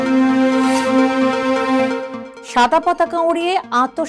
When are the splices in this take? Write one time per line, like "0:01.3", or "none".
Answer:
none